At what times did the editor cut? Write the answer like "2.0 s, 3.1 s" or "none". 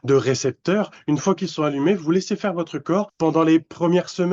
3.1 s